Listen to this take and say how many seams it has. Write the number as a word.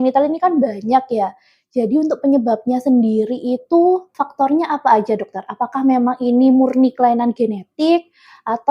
one